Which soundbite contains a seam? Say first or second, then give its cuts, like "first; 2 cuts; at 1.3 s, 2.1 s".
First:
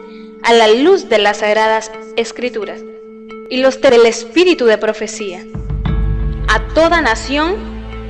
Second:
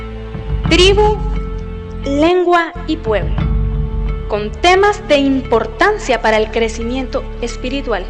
first; 1 cut; at 3.6 s